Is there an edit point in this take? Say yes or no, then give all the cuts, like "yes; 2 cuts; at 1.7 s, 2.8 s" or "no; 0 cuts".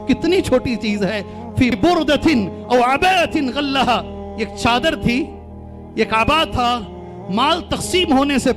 yes; 1 cut; at 1.8 s